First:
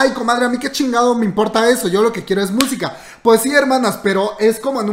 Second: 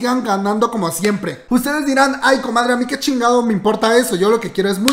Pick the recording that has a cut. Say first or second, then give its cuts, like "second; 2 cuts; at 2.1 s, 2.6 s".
second; 1 cut; at 1.4 s